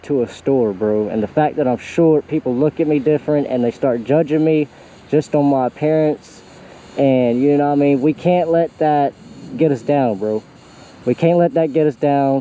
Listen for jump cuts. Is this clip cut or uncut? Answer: uncut